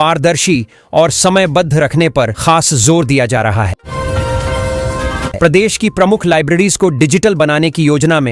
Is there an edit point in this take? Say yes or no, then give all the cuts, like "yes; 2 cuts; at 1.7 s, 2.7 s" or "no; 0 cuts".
yes; 2 cuts; at 3.8 s, 5.3 s